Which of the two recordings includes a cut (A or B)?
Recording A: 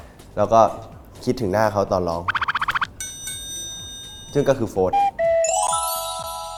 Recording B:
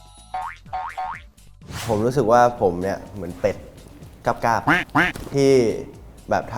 B